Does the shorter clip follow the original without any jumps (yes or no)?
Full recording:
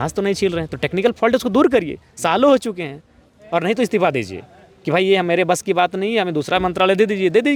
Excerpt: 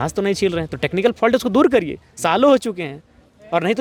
yes